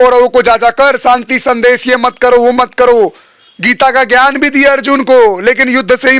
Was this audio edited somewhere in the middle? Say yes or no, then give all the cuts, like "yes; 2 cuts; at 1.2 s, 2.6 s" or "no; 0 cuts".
no; 0 cuts